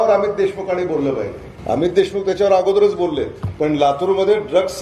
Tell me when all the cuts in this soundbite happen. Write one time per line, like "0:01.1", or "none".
0:01.5
0:03.4